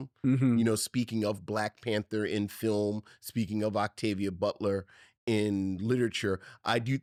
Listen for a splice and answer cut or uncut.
uncut